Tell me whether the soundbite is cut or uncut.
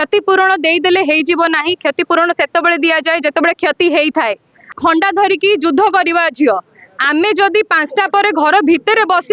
cut